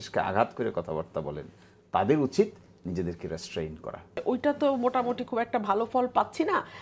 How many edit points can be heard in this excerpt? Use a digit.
1